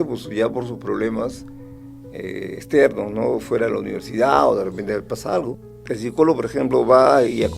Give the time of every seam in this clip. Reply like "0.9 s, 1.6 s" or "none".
5.7 s